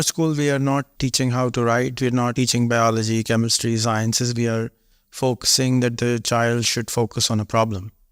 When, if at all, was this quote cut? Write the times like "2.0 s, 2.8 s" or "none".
1.0 s, 2.3 s